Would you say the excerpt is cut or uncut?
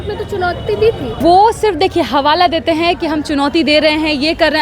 cut